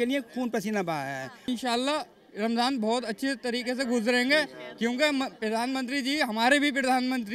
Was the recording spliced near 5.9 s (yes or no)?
no